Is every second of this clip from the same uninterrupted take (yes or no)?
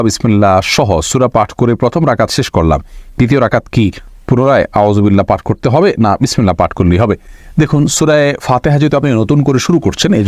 yes